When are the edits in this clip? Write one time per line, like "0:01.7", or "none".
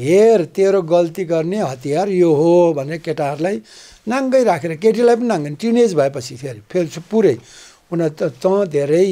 none